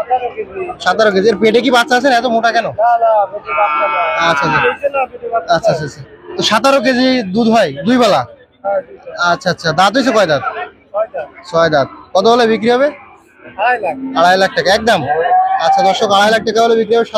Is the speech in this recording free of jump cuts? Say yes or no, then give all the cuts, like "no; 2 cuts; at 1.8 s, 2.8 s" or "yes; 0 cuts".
yes; 0 cuts